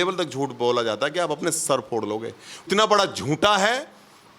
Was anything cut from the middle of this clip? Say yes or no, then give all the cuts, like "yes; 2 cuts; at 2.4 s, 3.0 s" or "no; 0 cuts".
yes; 1 cut; at 2.7 s